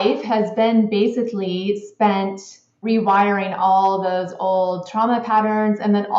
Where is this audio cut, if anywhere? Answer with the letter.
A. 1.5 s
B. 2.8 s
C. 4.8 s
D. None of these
B